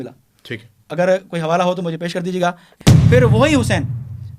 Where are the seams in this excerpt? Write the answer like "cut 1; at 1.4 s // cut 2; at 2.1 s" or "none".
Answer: cut 1; at 2.8 s